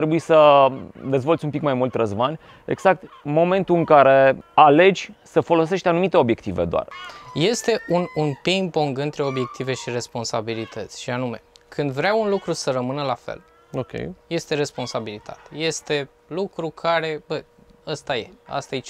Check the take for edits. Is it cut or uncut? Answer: cut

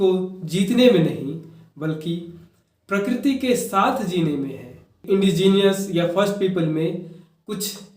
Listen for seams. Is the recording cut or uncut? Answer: cut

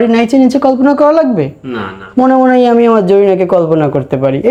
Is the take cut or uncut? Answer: uncut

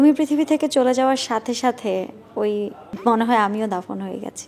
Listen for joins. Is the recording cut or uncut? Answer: uncut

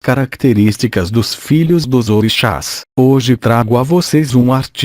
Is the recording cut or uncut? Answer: cut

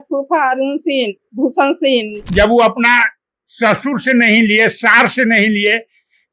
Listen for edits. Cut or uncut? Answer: cut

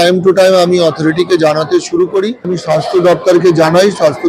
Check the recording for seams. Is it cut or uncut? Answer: cut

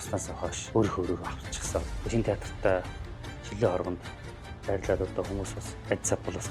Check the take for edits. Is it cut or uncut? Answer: uncut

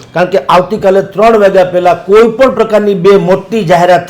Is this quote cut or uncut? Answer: uncut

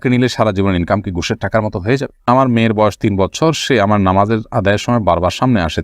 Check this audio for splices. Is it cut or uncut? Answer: cut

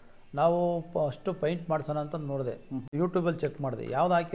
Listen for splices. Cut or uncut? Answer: cut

